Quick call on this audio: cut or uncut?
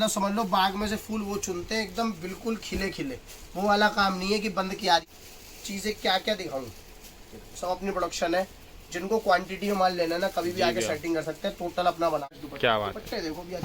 cut